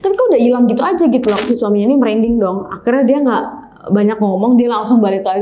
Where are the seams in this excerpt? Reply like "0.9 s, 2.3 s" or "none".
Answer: 1.4 s